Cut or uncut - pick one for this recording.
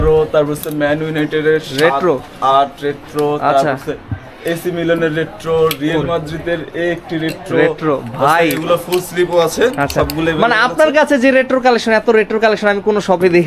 uncut